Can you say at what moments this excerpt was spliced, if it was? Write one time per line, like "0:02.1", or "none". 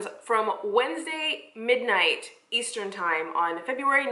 none